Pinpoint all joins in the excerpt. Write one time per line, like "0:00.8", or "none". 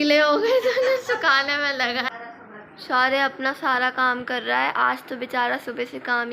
0:02.1